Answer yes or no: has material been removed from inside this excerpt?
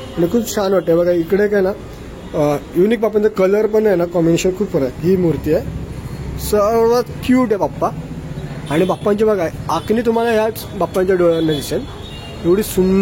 yes